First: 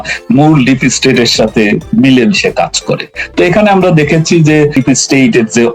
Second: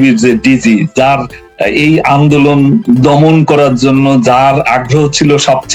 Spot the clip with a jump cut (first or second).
first